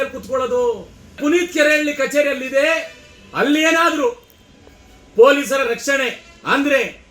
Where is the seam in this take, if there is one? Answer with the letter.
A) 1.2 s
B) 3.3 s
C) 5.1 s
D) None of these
A